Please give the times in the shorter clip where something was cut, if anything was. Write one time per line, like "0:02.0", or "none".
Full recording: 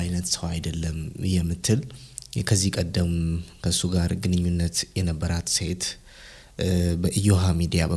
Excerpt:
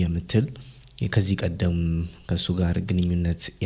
none